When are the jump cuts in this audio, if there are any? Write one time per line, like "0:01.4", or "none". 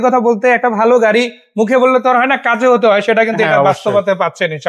none